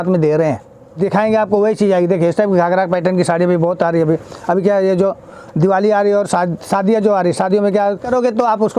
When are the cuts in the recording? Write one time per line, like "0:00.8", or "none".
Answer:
0:01.0
0:08.0